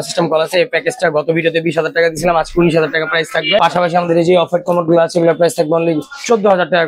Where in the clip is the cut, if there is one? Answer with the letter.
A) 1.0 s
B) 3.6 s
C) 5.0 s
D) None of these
B